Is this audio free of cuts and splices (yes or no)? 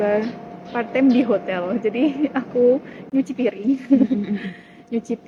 yes